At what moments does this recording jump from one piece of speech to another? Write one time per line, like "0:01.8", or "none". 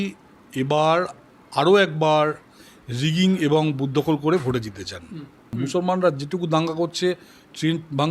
0:05.5